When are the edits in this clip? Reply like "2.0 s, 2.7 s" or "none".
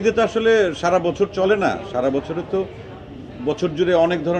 none